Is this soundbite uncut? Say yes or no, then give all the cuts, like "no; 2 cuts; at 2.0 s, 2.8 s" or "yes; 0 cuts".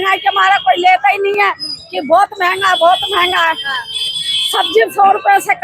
yes; 0 cuts